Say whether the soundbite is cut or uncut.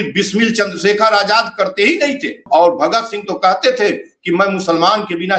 cut